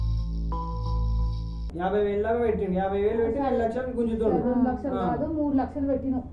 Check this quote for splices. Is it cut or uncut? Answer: cut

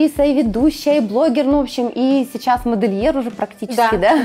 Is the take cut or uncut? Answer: uncut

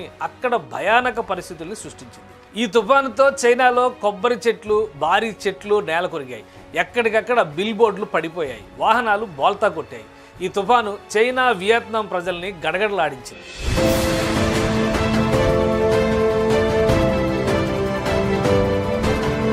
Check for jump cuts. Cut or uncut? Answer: uncut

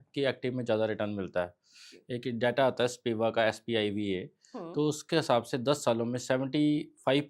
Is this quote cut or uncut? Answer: uncut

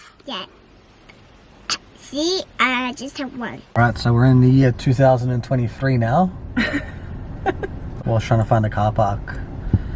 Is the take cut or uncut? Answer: cut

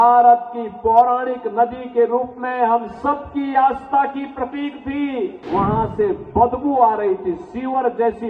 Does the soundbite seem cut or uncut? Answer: cut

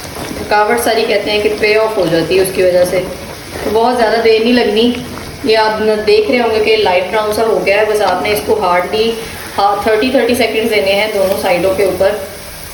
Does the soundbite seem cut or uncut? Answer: uncut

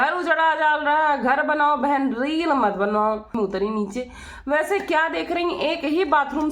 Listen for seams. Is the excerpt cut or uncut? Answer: cut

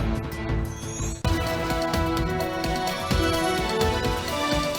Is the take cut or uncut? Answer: cut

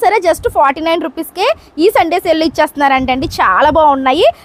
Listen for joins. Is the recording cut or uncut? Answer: uncut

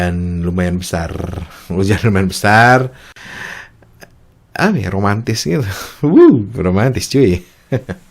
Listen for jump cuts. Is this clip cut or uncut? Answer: cut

